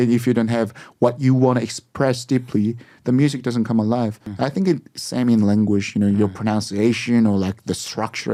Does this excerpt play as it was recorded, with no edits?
yes; 0 cuts

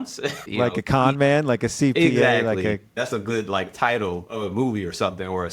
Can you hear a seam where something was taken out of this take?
yes; 1 cut; at 2.9 s

